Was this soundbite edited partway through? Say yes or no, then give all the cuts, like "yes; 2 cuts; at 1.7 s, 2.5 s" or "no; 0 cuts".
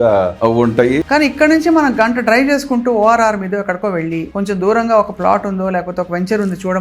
yes; 2 cuts; at 1.0 s, 4.3 s